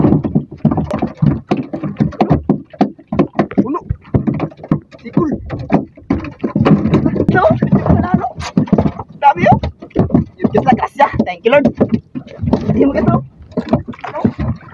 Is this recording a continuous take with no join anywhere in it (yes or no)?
no